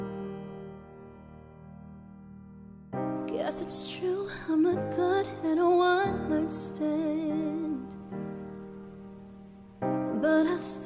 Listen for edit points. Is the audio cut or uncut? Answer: cut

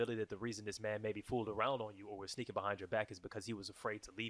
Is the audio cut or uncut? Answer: uncut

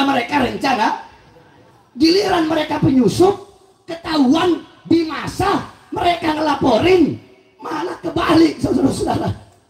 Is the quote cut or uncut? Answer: uncut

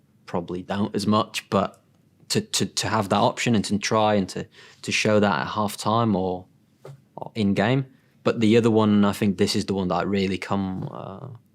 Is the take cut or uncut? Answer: cut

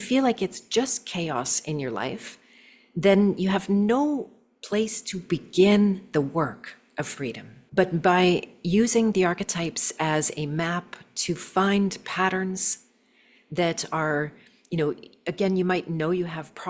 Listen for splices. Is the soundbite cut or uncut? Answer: cut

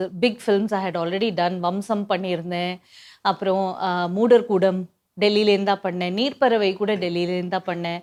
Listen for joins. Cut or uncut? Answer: uncut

